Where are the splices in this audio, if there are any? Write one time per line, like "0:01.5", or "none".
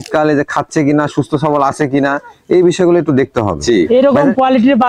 0:03.6